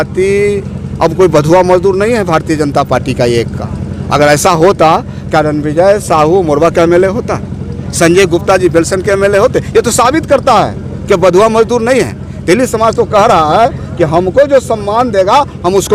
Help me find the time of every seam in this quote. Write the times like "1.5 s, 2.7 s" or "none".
none